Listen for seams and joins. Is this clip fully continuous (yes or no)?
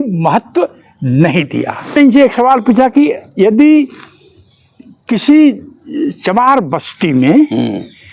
no